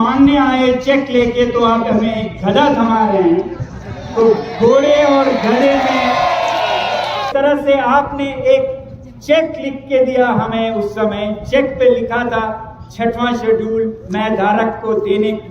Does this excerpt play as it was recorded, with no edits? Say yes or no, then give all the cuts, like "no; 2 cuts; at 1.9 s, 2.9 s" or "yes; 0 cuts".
no; 1 cut; at 7.3 s